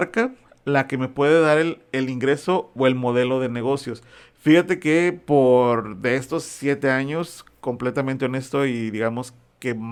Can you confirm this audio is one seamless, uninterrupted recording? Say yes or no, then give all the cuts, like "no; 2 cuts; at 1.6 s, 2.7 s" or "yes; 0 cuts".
yes; 0 cuts